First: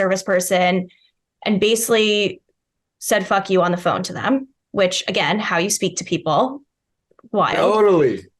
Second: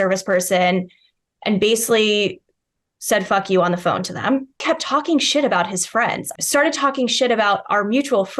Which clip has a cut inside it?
second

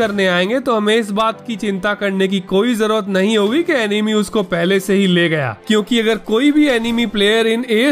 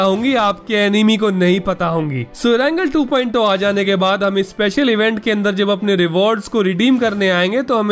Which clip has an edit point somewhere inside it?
second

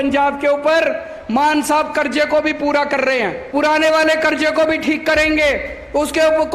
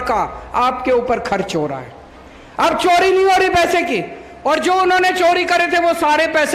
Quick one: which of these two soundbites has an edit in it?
first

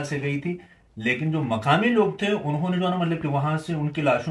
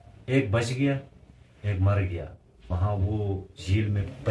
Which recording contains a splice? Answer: second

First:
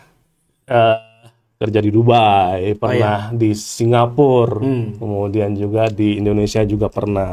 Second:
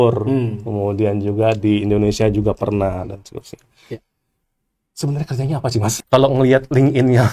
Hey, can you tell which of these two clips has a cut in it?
second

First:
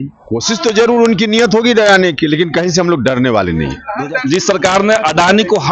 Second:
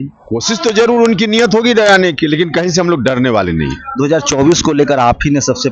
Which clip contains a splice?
first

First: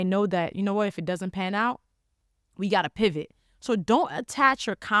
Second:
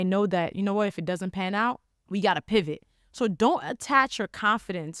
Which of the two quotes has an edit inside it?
second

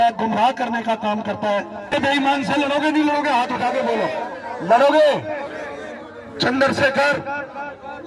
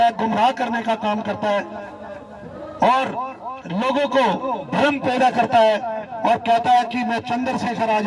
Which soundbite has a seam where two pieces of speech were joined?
first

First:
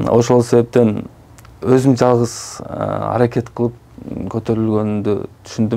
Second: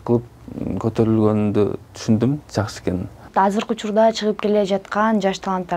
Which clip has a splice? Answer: second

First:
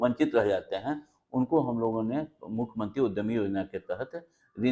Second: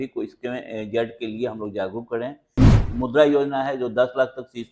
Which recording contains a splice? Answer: second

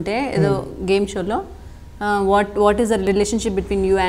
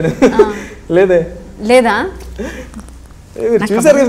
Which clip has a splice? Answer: first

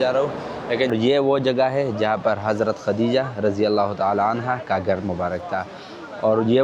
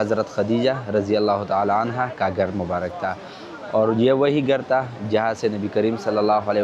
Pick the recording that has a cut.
first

